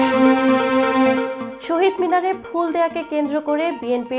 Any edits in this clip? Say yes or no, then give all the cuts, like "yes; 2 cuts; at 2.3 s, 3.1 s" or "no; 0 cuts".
yes; 1 cut; at 1.5 s